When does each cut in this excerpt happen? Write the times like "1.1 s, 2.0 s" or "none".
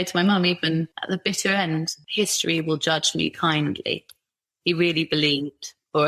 0.9 s, 2.0 s